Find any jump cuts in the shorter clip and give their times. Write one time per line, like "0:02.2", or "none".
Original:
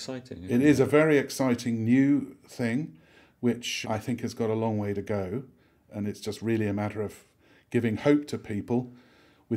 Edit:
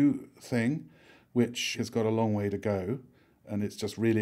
0:01.7